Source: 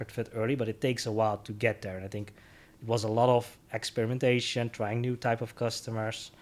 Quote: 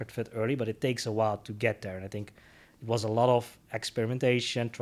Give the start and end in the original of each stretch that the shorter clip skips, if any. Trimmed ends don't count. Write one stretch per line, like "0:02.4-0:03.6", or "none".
none